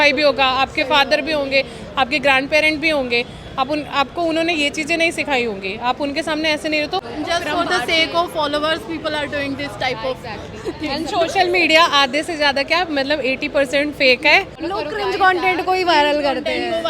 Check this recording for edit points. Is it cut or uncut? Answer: cut